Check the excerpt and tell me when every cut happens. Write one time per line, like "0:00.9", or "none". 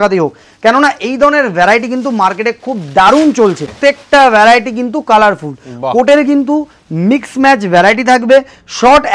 0:03.7